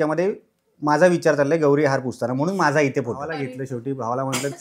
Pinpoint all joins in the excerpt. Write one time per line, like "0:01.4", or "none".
0:03.4